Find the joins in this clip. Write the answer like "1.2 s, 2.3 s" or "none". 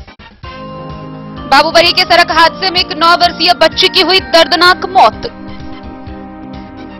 1.5 s

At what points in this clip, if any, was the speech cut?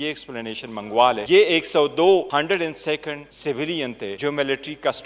1.2 s, 2.3 s, 3.3 s, 4.2 s

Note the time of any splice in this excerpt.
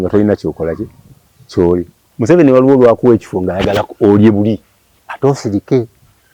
2.0 s

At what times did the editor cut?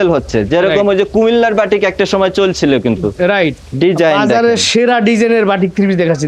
3.6 s

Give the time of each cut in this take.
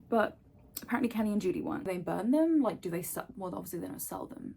1.9 s

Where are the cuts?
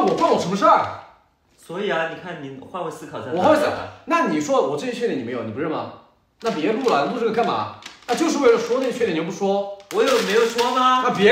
none

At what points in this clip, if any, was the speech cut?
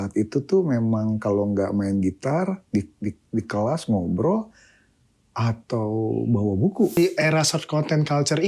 7.0 s

